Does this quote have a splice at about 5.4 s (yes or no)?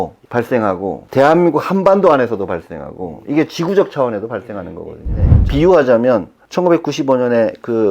yes